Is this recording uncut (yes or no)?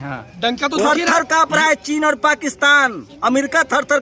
yes